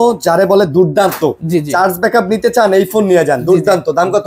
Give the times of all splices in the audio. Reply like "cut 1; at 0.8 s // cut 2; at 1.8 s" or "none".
none